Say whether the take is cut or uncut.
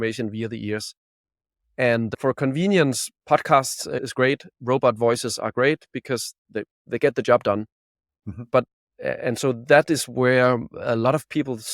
cut